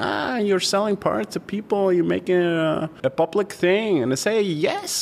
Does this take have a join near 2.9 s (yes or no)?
yes